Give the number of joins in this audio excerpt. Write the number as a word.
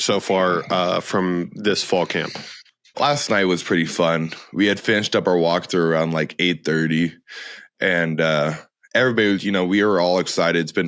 one